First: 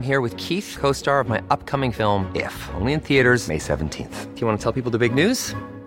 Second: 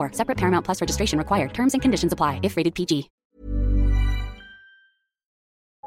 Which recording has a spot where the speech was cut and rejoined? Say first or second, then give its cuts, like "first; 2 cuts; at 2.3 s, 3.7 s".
second; 1 cut; at 3.2 s